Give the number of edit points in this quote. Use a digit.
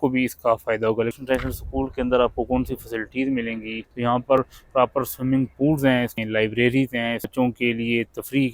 4